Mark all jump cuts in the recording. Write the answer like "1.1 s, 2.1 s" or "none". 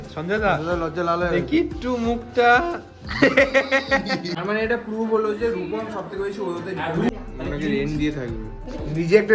4.3 s, 7.1 s